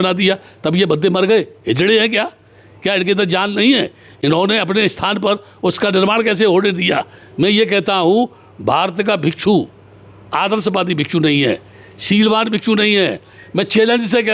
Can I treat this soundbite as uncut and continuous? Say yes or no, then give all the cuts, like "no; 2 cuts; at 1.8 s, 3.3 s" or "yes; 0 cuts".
yes; 0 cuts